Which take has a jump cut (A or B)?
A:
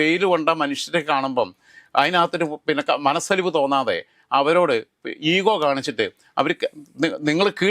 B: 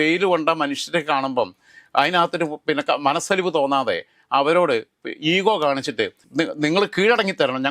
B